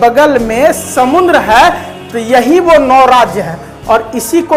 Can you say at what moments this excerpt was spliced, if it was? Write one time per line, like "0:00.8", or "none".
none